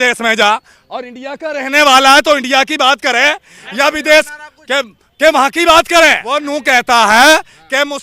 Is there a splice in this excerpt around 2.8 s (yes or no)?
no